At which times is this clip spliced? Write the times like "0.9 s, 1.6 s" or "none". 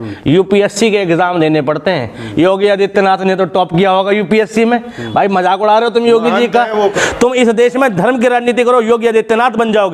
6.9 s